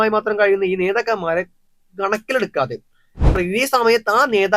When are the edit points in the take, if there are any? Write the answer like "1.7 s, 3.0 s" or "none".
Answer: 3.4 s